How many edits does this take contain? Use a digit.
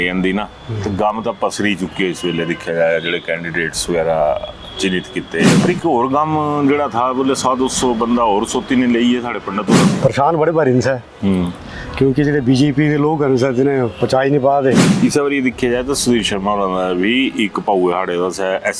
3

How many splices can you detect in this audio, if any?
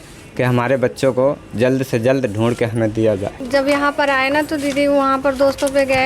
1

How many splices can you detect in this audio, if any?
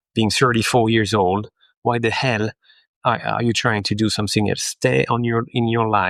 0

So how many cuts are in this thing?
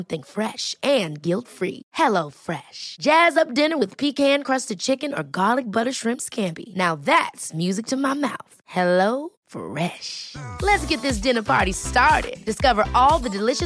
0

